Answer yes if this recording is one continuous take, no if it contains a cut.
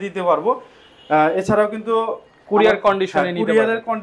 yes